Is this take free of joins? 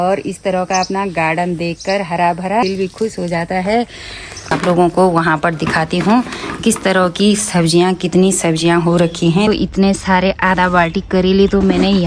no; 3 cuts; at 2.6 s, 4.5 s, 9.5 s

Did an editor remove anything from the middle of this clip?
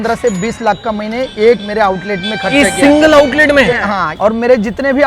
yes; 1 cut; at 4.1 s

